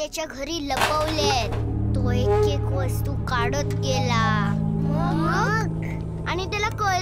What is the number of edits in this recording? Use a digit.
0